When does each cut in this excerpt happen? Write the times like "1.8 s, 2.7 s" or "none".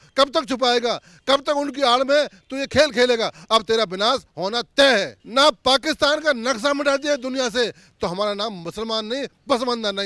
5.2 s